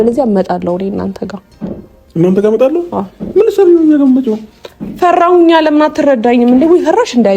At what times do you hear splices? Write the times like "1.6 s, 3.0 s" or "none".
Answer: none